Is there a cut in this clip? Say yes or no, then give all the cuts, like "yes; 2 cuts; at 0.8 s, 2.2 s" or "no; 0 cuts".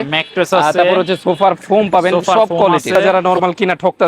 yes; 1 cut; at 3.0 s